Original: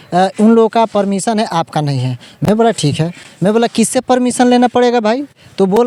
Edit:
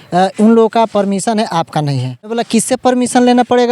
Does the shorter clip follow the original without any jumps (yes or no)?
no